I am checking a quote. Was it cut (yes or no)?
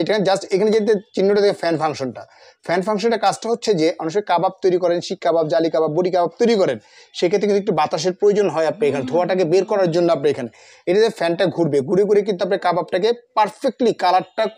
no